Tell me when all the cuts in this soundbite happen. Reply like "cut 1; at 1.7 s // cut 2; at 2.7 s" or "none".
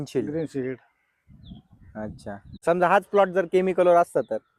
cut 1; at 2.5 s